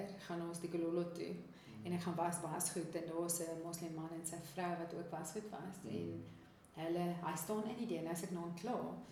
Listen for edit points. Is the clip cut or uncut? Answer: uncut